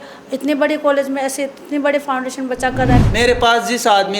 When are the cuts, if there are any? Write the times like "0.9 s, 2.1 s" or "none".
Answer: 3.0 s